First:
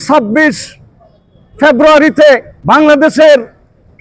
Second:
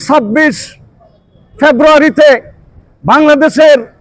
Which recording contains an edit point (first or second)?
first